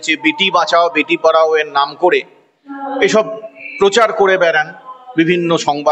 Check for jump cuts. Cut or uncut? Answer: uncut